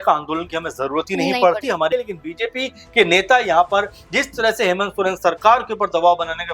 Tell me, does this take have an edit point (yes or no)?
yes